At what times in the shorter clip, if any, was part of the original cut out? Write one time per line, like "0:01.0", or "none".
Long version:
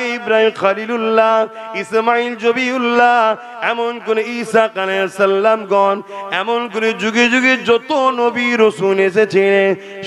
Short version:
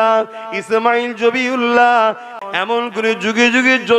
0:02.3